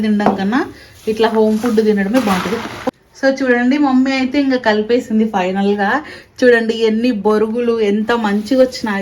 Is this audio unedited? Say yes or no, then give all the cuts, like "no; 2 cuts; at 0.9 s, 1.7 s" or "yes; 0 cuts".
no; 1 cut; at 2.8 s